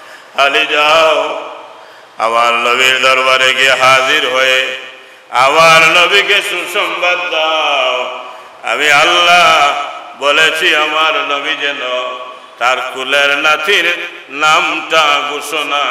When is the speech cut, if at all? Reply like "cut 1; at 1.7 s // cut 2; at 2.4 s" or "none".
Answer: none